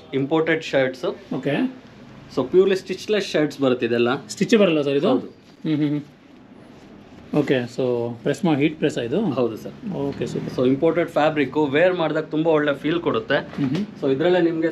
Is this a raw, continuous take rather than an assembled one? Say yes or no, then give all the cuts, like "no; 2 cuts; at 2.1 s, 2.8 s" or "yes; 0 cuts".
yes; 0 cuts